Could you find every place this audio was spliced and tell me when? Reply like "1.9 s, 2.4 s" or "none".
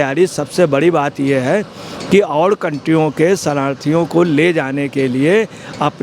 none